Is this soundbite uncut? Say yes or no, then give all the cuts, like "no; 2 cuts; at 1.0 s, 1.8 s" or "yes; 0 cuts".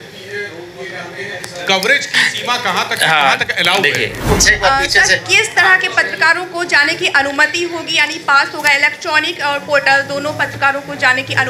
no; 1 cut; at 4.2 s